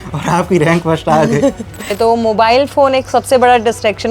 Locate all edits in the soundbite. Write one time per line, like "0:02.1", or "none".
0:01.8